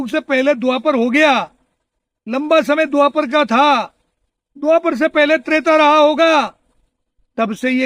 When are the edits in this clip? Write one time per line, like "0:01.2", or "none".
none